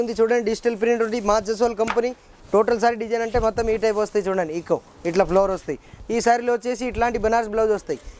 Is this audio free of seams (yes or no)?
no